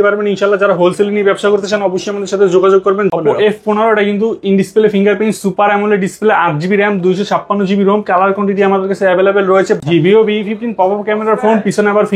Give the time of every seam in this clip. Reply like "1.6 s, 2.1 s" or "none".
3.1 s, 9.8 s